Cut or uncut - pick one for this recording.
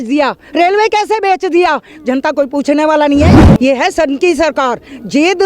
cut